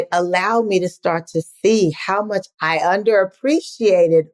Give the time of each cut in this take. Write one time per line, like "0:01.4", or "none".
0:02.5